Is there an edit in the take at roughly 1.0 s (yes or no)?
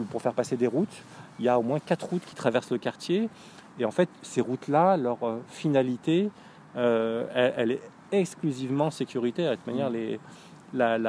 no